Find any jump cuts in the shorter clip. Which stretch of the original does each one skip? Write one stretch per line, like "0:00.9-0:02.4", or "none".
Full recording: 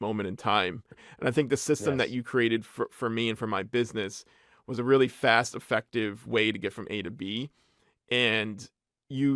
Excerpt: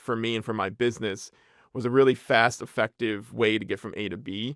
none